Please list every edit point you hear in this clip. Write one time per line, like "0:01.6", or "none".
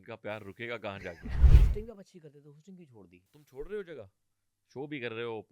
0:01.5
0:03.5